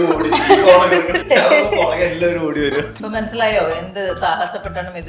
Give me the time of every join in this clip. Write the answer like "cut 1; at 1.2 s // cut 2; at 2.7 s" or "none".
cut 1; at 1.2 s // cut 2; at 3.0 s